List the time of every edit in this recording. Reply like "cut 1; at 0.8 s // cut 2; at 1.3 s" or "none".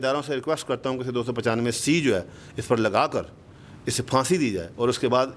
none